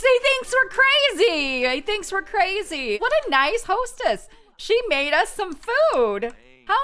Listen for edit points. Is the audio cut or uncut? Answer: cut